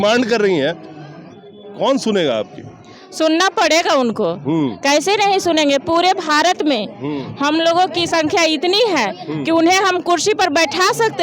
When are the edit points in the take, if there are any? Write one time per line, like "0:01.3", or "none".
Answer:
none